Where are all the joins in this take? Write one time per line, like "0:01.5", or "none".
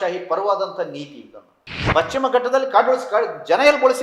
0:01.8